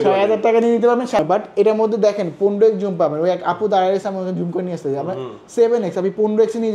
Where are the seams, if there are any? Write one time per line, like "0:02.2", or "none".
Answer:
0:01.2